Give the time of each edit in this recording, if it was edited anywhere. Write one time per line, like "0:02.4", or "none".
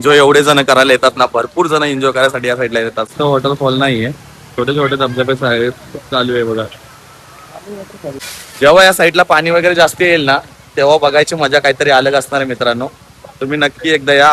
0:03.1
0:08.1